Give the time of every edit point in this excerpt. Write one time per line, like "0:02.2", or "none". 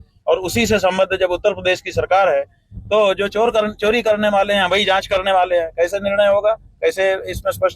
0:06.5